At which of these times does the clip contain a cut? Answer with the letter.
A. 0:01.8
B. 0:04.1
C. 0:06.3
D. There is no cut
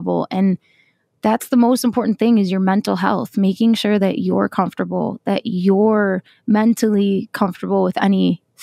D